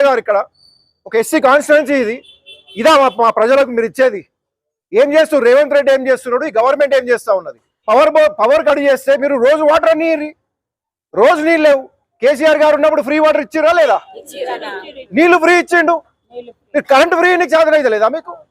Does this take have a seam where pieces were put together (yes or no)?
yes